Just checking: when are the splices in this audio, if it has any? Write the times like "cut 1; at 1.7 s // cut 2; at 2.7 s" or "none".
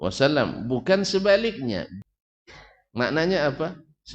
cut 1; at 1.9 s

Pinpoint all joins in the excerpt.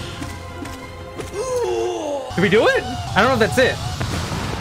cut 1; at 2.3 s // cut 2; at 3.0 s

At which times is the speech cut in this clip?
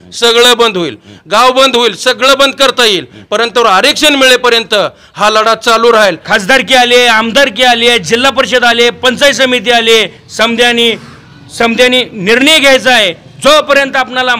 cut 1; at 6.2 s

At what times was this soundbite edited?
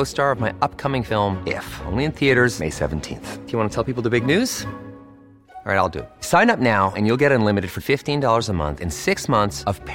none

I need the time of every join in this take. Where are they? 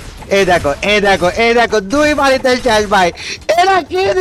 none

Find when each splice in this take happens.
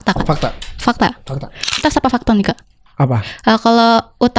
cut 1; at 1.8 s

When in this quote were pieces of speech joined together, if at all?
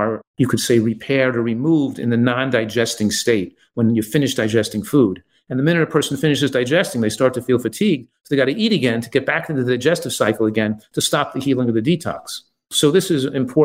none

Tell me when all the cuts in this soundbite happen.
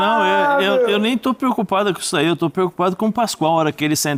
none

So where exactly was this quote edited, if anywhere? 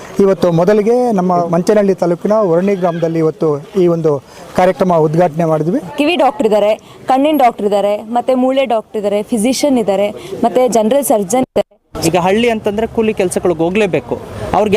cut 1; at 1.4 s // cut 2; at 5.9 s // cut 3; at 11.8 s

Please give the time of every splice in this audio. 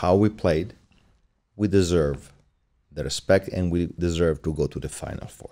none

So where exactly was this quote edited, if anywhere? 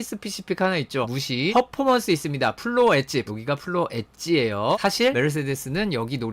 cut 1; at 1.4 s // cut 2; at 3.3 s // cut 3; at 5.0 s

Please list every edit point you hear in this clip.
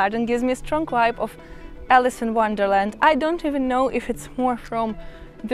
none

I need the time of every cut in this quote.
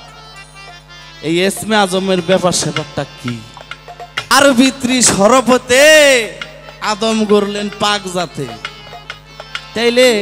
cut 1; at 4.3 s

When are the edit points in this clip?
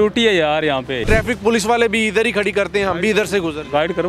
cut 1; at 1.0 s

